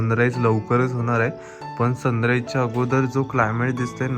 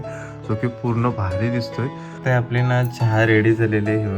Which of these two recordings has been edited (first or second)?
second